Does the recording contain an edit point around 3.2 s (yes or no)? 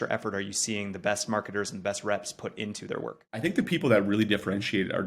yes